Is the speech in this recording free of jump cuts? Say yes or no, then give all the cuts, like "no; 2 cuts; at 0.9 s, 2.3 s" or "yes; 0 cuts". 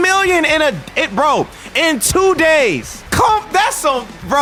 yes; 0 cuts